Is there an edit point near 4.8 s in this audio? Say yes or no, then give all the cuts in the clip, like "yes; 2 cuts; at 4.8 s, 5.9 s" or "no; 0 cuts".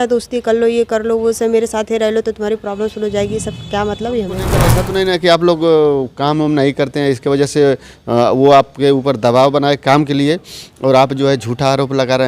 yes; 1 cut; at 4.8 s